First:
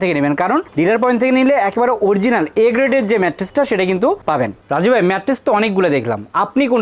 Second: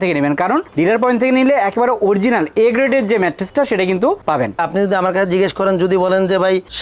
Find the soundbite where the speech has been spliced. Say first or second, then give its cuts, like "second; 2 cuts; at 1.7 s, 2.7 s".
second; 1 cut; at 4.5 s